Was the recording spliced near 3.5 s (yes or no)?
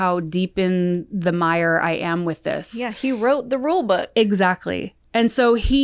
no